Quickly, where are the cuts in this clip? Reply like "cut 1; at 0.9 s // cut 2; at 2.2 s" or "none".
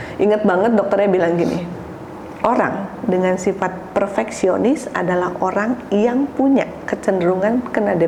none

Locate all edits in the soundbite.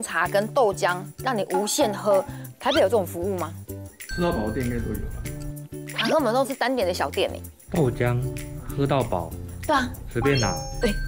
none

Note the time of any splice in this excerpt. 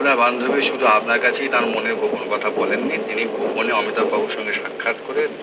none

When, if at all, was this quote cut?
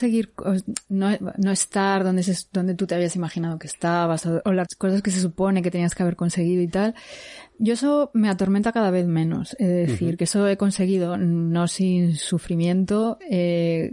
cut 1; at 4.5 s

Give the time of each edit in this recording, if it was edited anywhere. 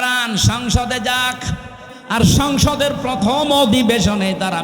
cut 1; at 2.0 s

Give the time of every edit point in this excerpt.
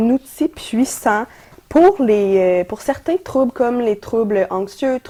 none

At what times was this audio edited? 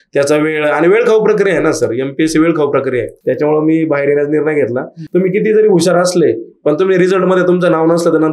cut 1; at 3.1 s // cut 2; at 5.0 s

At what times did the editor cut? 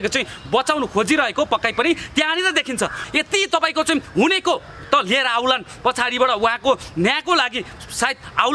cut 1; at 3.0 s

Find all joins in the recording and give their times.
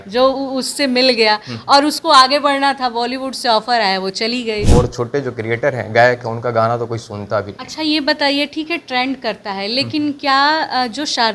cut 1; at 4.7 s

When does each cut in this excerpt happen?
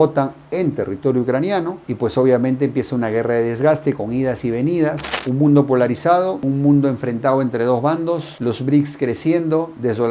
cut 1; at 5.1 s

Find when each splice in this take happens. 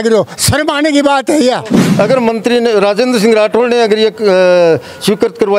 cut 1; at 1.8 s

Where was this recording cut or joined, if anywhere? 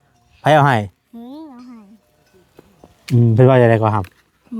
none

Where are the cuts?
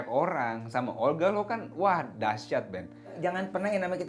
cut 1; at 3.2 s

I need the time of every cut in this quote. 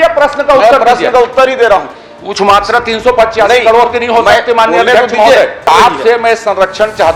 cut 1; at 2.0 s // cut 2; at 5.7 s

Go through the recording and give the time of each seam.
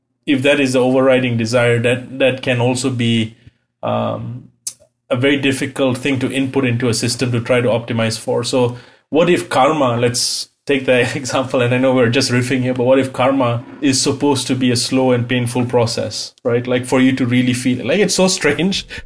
cut 1; at 13.8 s

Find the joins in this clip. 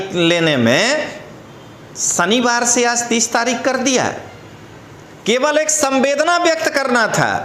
none

